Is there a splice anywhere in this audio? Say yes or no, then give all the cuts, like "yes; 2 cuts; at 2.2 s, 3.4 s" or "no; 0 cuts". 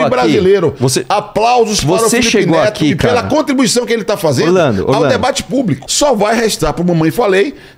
yes; 1 cut; at 5.8 s